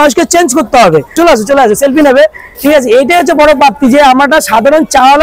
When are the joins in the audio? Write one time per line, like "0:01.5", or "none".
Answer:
0:01.1